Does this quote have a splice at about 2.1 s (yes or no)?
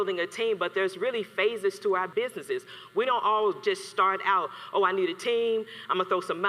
yes